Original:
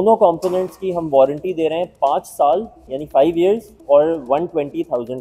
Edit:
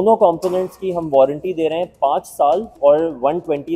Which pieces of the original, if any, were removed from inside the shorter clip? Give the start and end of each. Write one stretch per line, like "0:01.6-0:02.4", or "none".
0:02.7-0:03.8